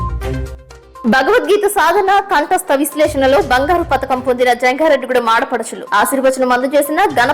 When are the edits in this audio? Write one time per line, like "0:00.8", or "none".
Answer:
0:00.9

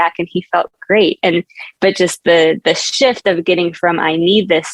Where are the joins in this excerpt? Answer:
none

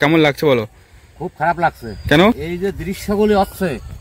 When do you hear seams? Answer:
0:02.5

